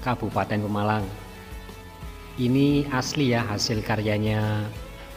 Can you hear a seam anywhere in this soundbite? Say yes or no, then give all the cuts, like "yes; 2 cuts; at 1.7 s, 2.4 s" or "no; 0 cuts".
no; 0 cuts